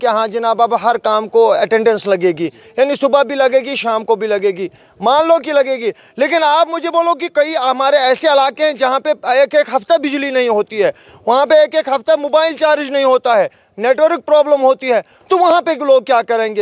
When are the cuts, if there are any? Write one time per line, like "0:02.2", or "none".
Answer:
none